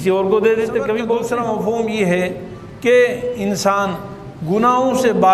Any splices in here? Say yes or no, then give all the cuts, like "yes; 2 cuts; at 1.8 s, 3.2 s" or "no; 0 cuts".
yes; 1 cut; at 1.3 s